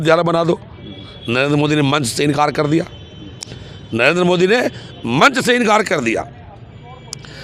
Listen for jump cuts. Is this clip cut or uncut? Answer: uncut